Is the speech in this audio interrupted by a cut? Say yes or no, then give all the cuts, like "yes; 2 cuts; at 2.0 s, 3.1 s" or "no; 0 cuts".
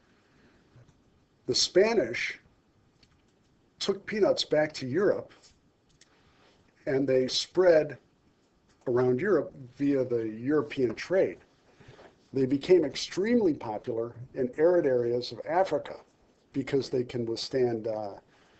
no; 0 cuts